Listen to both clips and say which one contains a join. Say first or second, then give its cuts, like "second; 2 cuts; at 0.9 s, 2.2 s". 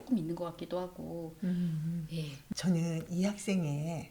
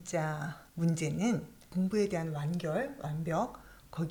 first; 1 cut; at 2.3 s